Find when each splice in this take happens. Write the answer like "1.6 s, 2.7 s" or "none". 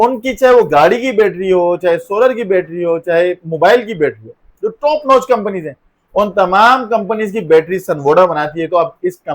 none